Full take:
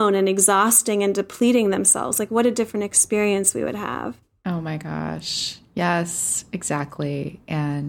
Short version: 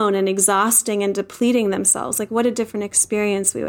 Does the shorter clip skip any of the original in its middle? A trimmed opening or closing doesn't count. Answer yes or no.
no